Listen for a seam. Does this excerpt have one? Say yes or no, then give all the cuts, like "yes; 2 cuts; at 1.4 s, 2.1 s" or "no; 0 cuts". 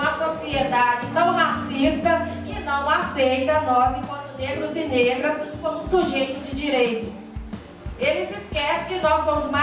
no; 0 cuts